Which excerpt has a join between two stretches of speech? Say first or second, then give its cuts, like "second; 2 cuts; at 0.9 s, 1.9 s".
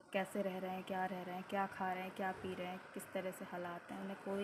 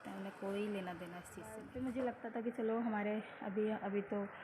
second; 1 cut; at 1.7 s